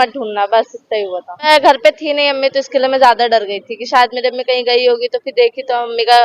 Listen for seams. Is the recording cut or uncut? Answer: cut